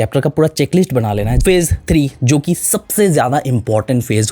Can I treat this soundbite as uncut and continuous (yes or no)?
no